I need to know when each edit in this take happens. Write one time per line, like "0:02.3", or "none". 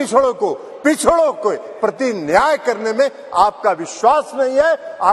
none